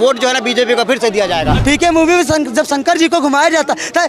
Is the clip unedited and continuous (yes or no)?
no